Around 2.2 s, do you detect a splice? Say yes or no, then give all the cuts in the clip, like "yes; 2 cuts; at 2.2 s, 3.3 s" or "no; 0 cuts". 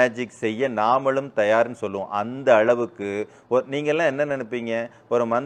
no; 0 cuts